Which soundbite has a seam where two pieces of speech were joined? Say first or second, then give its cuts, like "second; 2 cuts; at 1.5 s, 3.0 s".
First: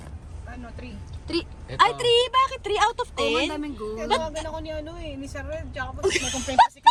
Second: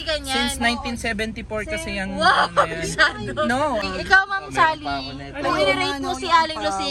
second; 1 cut; at 3.9 s